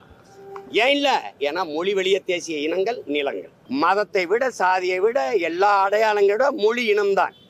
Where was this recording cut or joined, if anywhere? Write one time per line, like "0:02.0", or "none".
0:03.5